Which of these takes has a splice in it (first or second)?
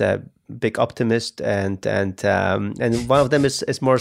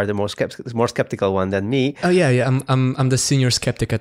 second